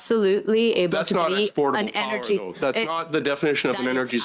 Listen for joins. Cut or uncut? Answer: uncut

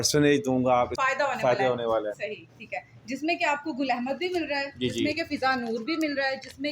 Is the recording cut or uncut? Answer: cut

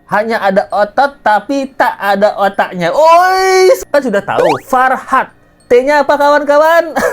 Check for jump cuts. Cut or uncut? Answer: cut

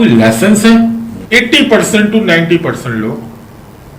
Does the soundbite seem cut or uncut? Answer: cut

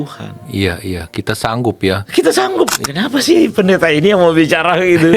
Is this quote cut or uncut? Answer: cut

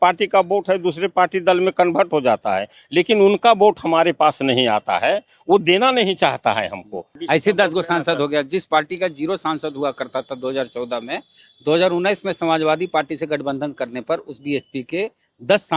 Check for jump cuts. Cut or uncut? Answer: cut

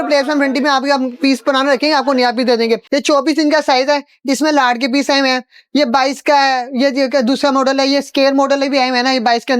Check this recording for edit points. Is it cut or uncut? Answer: cut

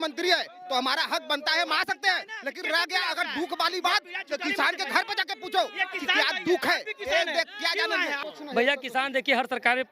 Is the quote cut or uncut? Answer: cut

